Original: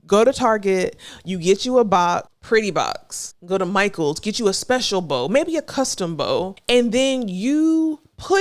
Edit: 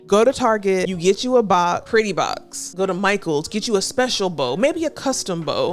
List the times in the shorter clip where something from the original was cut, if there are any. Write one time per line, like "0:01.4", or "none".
0:00.9
0:02.1